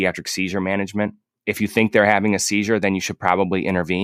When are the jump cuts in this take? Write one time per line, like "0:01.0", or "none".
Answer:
none